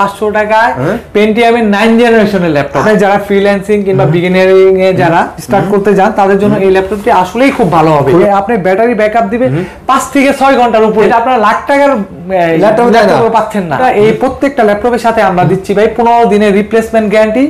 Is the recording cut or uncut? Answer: cut